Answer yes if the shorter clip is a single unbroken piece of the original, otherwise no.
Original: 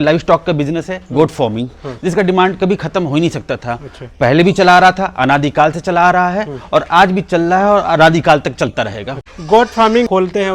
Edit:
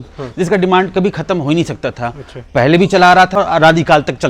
no